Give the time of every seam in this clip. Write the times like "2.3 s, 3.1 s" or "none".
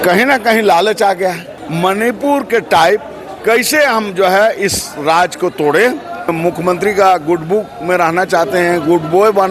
1.6 s, 6.3 s